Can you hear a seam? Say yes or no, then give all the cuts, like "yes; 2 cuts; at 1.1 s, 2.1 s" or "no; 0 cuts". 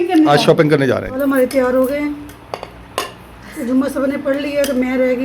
yes; 1 cut; at 1.1 s